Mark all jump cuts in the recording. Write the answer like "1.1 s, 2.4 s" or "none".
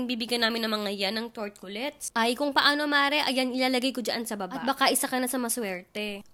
none